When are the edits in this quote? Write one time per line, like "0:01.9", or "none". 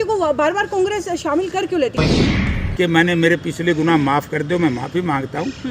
0:02.3